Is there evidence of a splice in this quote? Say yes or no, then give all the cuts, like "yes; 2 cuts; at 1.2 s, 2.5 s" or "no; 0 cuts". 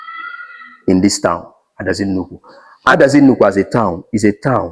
yes; 1 cut; at 2.9 s